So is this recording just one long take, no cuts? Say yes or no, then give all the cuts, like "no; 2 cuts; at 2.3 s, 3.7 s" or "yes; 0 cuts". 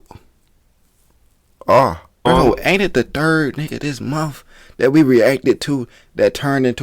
no; 1 cut; at 2.3 s